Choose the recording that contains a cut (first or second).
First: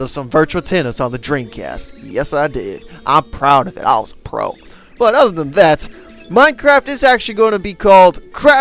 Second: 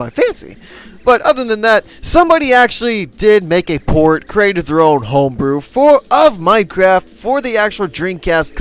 second